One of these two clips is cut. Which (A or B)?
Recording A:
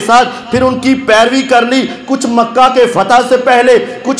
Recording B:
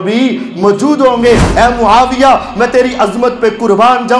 B